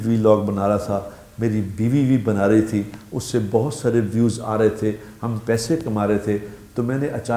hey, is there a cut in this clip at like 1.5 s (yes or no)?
no